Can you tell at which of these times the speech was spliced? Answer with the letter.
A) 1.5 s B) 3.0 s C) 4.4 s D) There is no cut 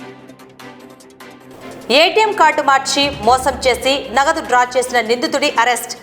A